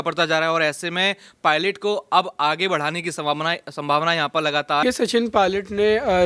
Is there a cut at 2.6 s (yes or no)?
no